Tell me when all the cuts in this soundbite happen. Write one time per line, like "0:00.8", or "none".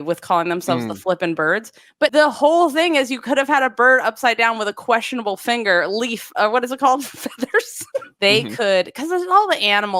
0:08.1